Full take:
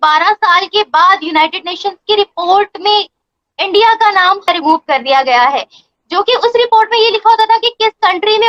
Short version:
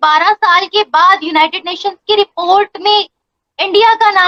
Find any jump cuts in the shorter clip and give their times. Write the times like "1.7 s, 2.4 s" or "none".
none